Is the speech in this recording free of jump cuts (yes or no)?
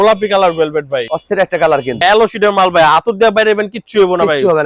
no